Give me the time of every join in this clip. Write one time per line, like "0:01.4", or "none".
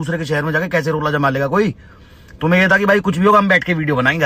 none